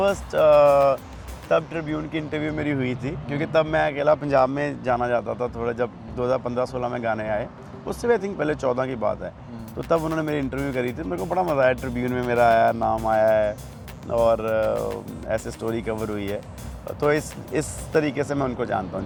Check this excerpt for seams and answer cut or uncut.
uncut